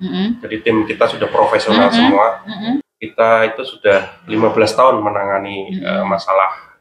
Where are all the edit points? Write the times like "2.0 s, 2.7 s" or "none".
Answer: 2.9 s